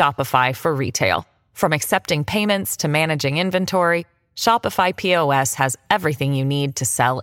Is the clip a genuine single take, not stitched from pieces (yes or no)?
yes